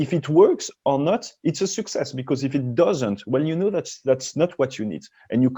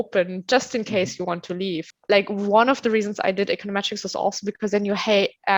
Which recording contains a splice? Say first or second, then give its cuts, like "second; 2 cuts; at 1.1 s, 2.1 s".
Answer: second; 1 cut; at 1.8 s